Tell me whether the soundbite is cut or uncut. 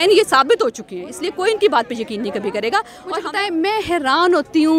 cut